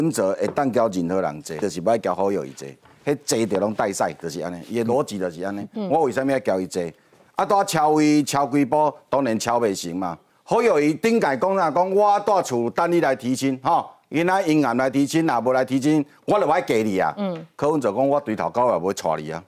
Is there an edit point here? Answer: yes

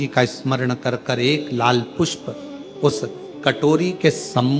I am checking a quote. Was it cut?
no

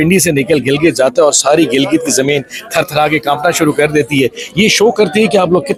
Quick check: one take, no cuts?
yes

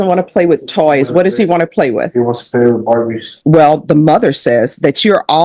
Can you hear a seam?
yes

